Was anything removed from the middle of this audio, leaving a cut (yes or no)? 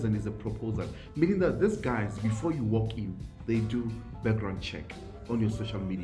no